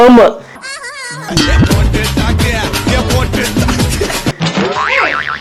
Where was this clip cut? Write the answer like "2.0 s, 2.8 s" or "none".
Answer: none

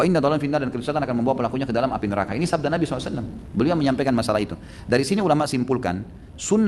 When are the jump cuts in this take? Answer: none

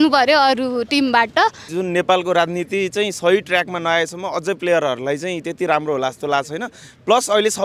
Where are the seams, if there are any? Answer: 1.7 s

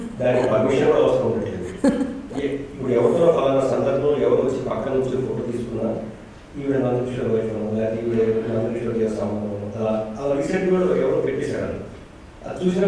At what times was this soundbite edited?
none

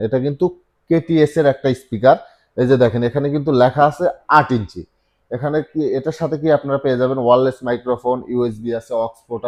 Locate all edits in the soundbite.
none

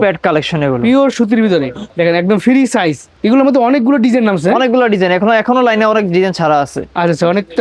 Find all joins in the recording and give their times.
1.8 s, 3.1 s

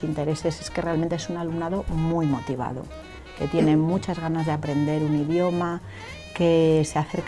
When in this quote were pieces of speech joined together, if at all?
none

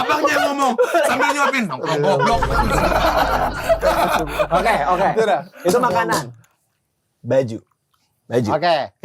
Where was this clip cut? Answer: none

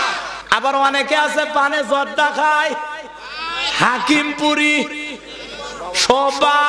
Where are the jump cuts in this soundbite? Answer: none

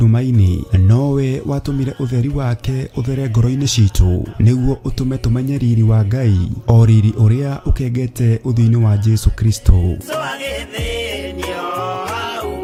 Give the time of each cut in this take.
none

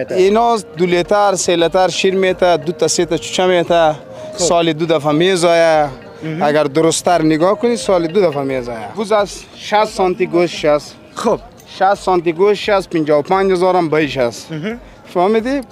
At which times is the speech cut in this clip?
8.9 s

